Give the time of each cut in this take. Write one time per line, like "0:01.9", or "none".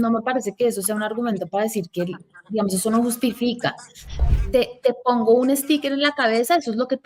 0:04.2